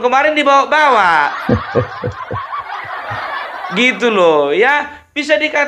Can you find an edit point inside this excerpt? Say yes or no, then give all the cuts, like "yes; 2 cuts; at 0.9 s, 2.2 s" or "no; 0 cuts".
no; 0 cuts